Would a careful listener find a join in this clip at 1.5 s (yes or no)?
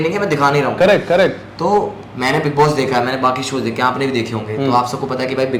no